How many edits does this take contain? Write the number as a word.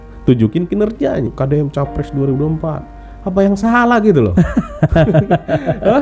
one